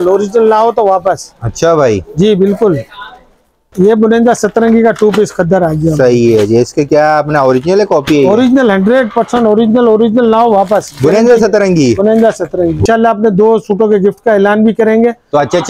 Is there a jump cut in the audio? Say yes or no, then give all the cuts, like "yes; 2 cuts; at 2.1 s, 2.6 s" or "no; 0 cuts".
yes; 2 cuts; at 3.7 s, 12.8 s